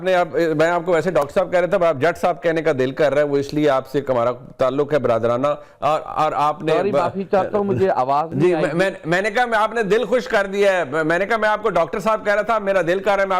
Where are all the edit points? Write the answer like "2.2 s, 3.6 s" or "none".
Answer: none